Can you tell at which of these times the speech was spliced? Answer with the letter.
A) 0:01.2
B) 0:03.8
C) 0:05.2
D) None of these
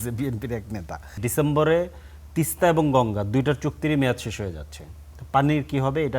A